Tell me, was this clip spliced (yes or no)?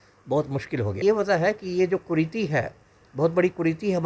yes